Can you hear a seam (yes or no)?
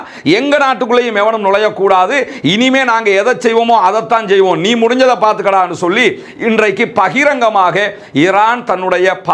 no